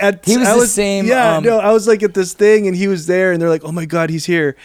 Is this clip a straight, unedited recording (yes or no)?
yes